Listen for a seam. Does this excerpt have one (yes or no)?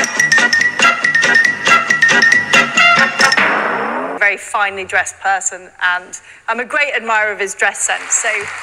yes